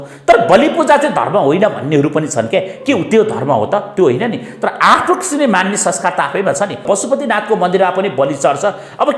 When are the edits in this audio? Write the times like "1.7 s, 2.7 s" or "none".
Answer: 6.8 s